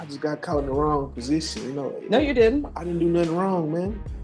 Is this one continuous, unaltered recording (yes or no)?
yes